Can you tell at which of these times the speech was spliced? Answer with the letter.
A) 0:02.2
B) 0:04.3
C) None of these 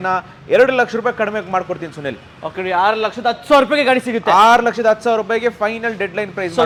C